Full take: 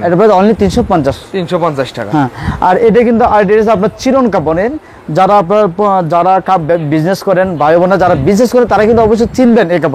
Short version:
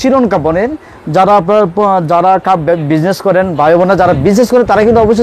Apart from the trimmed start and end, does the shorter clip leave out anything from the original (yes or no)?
no